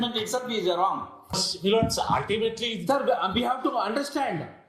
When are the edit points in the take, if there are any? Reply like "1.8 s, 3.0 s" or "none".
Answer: 1.5 s